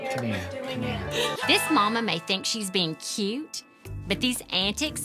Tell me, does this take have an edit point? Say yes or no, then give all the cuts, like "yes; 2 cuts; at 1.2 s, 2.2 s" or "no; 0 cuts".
yes; 1 cut; at 1.4 s